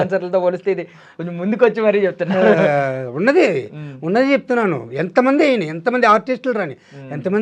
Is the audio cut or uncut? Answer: uncut